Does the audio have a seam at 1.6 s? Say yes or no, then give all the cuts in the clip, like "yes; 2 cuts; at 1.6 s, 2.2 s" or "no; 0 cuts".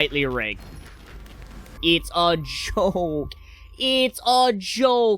yes; 1 cut; at 1.6 s